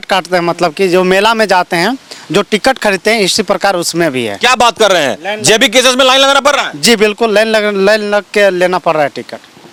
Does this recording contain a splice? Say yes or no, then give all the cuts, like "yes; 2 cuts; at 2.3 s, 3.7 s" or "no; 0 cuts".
no; 0 cuts